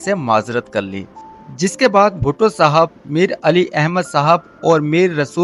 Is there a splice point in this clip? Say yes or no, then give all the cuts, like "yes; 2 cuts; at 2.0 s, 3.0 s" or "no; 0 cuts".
no; 0 cuts